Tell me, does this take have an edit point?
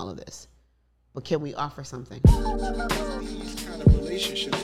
yes; 1 cut; at 2.1 s

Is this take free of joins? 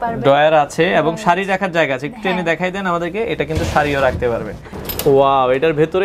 no; 1 cut; at 4.7 s

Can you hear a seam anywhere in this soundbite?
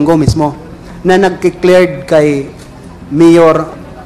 no; 0 cuts

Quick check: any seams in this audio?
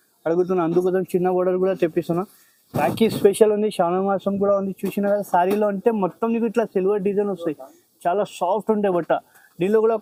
no; 0 cuts

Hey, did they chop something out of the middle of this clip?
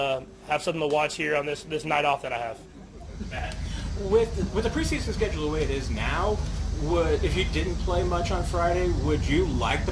no; 0 cuts

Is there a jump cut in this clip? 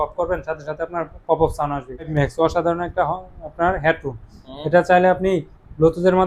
yes; 1 cut; at 2.1 s

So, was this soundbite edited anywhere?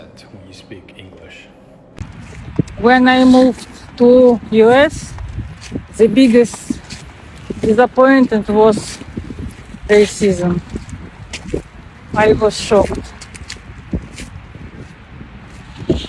yes; 1 cut; at 1.9 s

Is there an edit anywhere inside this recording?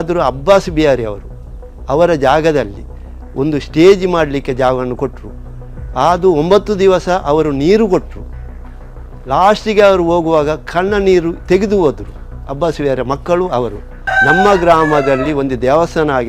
yes; 1 cut; at 14.1 s

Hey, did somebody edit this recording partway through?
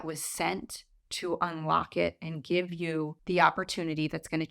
yes; 1 cut; at 3.2 s

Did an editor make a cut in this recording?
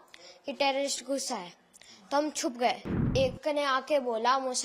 yes; 1 cut; at 3.1 s

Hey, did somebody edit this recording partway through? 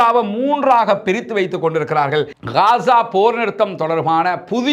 yes; 1 cut; at 2.4 s

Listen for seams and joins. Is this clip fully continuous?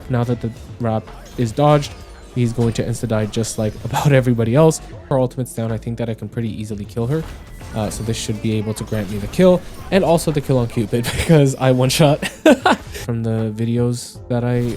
no; 2 cuts; at 5.1 s, 13.1 s

